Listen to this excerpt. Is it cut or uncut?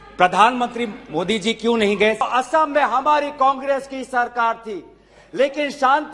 cut